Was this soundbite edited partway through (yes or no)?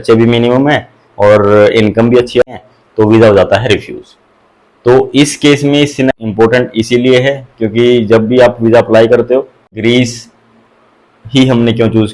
yes